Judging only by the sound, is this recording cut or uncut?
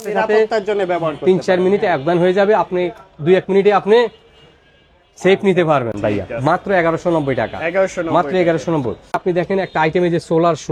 uncut